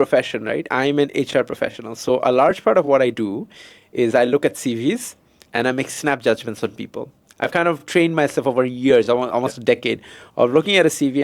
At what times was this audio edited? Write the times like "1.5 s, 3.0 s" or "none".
none